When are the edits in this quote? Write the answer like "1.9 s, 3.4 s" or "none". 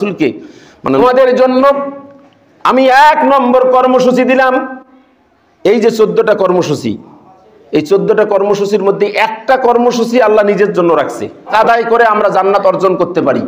1.0 s, 11.5 s